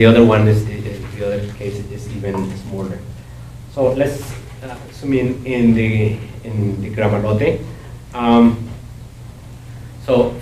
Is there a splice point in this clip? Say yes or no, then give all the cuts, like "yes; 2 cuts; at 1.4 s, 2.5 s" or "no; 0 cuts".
no; 0 cuts